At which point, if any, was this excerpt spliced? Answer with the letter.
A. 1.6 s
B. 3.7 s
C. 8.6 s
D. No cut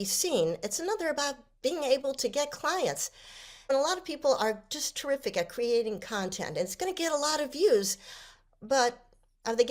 B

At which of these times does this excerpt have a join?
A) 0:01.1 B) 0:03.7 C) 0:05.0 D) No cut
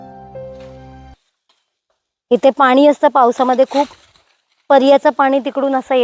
A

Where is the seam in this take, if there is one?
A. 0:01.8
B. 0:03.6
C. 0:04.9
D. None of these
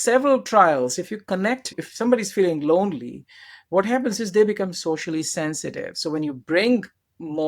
A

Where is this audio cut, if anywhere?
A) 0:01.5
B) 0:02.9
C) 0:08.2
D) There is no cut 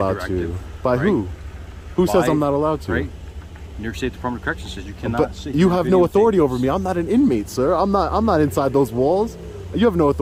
D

